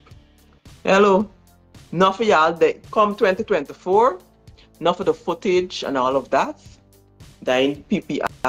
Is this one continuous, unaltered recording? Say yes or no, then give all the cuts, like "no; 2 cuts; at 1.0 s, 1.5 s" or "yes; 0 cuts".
yes; 0 cuts